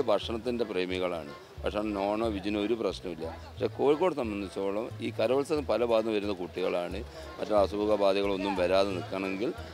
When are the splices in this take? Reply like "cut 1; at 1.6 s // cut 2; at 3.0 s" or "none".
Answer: none